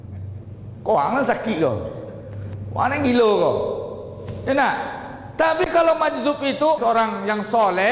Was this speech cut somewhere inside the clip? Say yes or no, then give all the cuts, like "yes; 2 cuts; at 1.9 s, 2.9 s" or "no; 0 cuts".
yes; 1 cut; at 6.8 s